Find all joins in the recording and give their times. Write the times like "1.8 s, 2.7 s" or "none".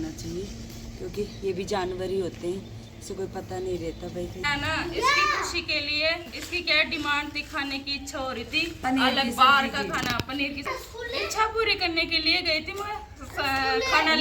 4.4 s, 10.7 s